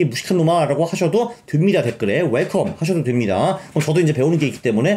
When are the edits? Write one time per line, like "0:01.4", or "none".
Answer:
none